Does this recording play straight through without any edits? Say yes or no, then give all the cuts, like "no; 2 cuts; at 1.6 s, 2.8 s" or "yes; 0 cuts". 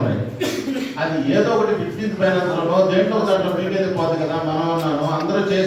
yes; 0 cuts